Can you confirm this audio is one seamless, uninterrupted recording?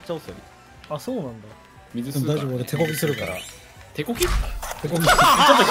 yes; 0 cuts

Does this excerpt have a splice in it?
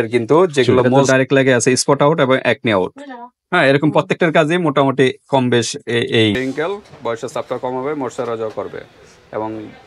yes; 2 cuts; at 1.0 s, 6.4 s

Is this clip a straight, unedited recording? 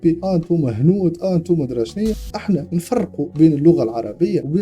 no; 1 cut; at 2.2 s

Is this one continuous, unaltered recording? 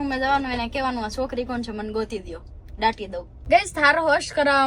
no; 1 cut; at 3.3 s

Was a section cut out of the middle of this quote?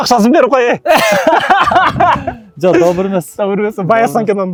no; 0 cuts

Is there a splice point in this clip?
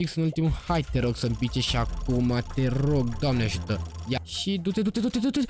yes; 1 cut; at 4.0 s

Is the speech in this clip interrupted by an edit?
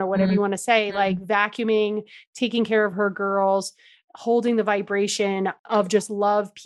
yes; 1 cut; at 5.6 s

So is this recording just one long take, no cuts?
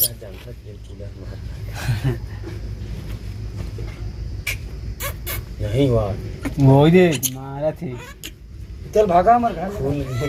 yes; 0 cuts

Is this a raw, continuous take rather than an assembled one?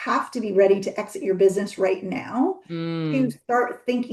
yes; 0 cuts

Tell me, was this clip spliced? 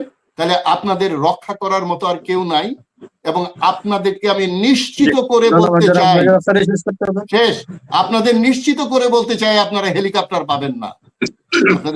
no; 0 cuts

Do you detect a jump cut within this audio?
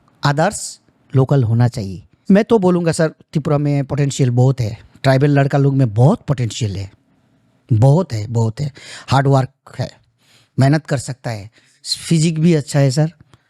yes; 1 cut; at 2.1 s

